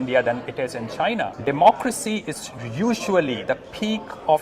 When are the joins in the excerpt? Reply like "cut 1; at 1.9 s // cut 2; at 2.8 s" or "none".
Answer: cut 1; at 1.3 s